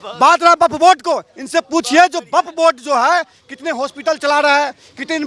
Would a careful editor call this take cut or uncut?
uncut